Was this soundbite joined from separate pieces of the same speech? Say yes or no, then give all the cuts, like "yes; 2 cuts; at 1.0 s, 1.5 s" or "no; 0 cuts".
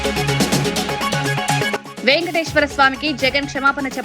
yes; 1 cut; at 1.3 s